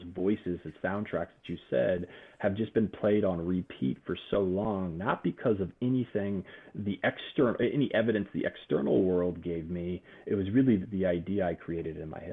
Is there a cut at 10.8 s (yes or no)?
yes